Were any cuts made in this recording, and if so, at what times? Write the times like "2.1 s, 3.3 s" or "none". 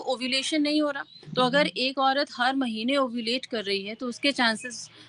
1.2 s

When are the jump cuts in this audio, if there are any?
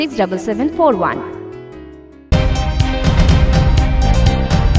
2.3 s

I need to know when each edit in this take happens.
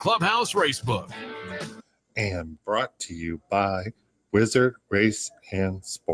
1.7 s

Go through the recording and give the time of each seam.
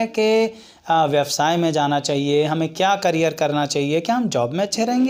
none

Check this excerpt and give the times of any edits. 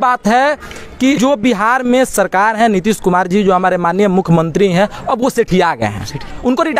1.2 s

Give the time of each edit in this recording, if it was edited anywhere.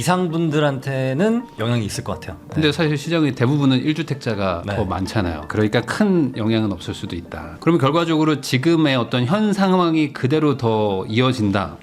2.3 s, 7.5 s

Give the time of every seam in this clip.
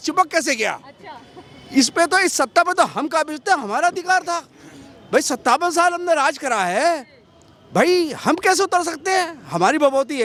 none

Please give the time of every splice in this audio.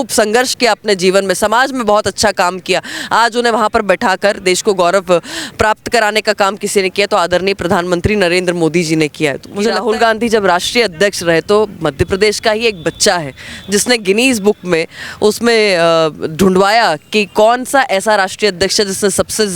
9.4 s

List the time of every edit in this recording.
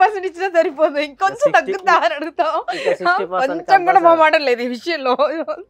none

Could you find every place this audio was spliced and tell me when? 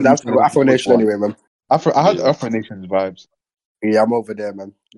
1.5 s

